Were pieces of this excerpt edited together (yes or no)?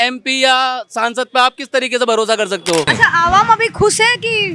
yes